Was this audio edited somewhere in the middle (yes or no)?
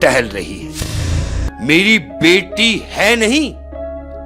yes